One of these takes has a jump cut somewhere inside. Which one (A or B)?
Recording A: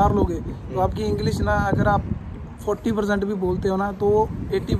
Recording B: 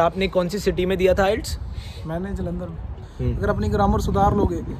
B